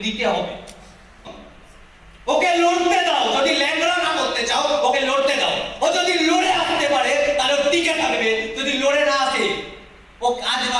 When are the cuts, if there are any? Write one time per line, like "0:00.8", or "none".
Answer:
0:01.3